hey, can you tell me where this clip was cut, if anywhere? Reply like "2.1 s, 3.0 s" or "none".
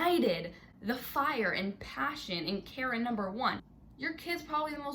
3.7 s